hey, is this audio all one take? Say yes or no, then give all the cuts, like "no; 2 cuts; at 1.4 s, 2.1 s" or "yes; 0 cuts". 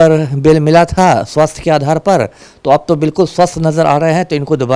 yes; 0 cuts